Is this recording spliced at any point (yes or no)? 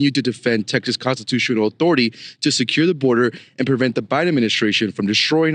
no